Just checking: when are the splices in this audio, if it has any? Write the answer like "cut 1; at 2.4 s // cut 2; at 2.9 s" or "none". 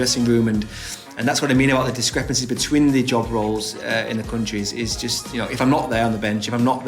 none